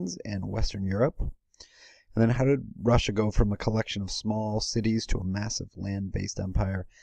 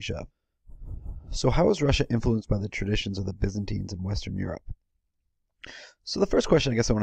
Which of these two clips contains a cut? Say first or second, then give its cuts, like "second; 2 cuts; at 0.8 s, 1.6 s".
first; 1 cut; at 5.8 s